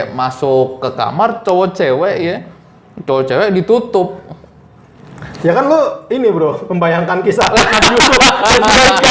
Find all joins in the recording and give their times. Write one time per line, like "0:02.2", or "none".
none